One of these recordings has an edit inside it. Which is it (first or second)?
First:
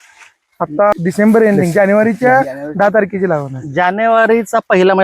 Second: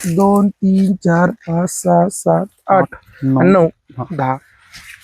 first